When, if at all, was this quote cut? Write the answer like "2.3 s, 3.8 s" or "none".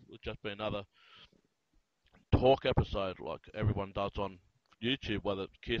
none